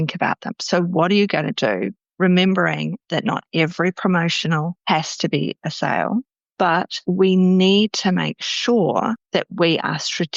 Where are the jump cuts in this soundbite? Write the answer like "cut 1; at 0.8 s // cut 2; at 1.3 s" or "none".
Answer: none